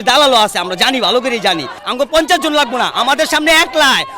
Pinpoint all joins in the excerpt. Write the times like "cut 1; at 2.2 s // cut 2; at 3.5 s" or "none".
cut 1; at 1.8 s

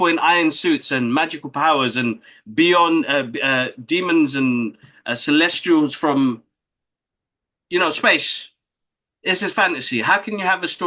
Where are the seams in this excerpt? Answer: none

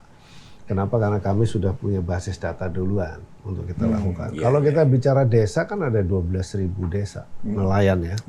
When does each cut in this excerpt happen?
none

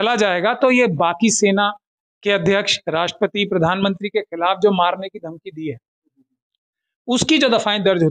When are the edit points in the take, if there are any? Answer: none

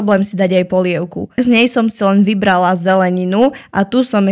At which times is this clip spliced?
cut 1; at 1.3 s

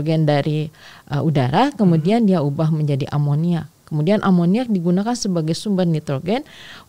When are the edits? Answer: none

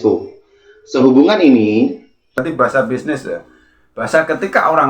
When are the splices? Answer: cut 1; at 2.4 s

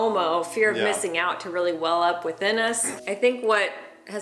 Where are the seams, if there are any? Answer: cut 1; at 2.9 s

